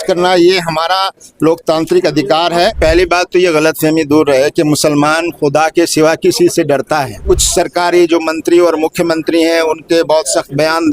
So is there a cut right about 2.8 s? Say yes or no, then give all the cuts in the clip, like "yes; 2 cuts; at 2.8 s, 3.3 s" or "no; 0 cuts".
yes; 2 cuts; at 2.8 s, 7.1 s